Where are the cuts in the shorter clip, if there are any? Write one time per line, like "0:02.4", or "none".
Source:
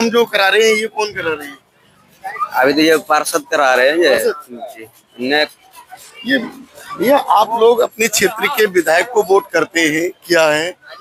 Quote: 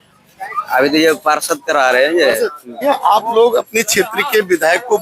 0:02.8